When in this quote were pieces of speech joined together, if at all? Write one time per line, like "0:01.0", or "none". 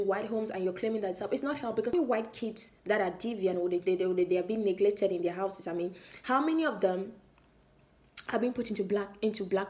0:01.9